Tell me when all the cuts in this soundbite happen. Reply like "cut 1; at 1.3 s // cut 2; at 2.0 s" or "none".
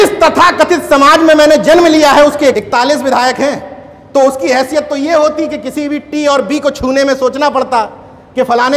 cut 1; at 2.6 s